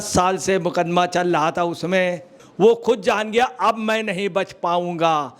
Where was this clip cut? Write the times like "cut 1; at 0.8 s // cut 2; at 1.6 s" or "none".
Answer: cut 1; at 2.4 s